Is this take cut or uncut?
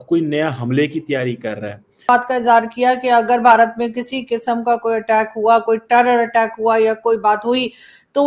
cut